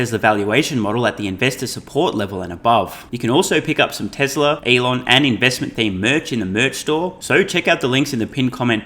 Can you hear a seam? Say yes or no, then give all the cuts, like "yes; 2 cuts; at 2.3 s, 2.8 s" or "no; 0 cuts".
yes; 3 cuts; at 3.1 s, 4.6 s, 7.2 s